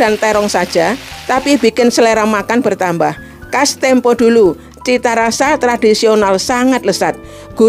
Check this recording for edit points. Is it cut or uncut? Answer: uncut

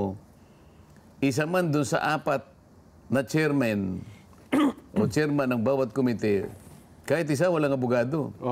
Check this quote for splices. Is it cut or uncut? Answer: uncut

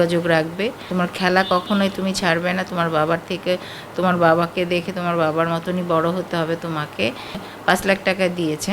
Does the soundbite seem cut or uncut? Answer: cut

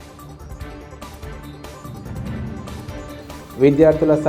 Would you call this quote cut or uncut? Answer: cut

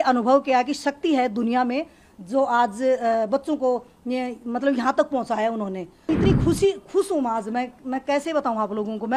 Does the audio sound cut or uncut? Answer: cut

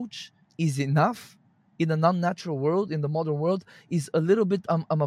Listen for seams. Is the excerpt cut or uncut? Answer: uncut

